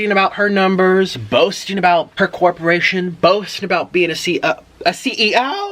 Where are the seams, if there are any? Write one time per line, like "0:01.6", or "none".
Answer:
0:02.1